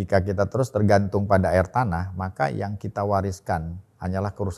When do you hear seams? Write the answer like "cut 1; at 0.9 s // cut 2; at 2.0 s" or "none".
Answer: none